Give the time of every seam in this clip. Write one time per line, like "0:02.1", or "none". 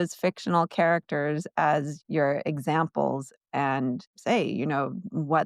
0:01.9
0:04.1

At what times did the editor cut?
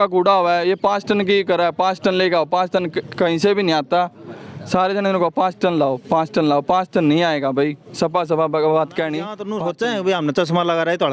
0:09.4

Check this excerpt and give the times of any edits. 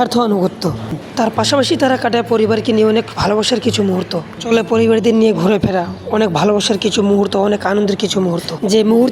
0:01.0

